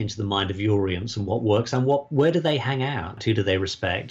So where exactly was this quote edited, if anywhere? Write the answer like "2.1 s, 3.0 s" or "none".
3.2 s